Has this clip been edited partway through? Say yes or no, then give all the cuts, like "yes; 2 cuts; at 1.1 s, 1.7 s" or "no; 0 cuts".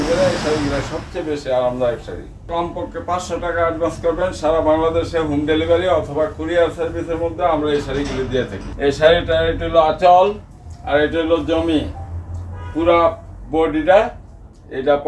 yes; 2 cuts; at 2.5 s, 8.6 s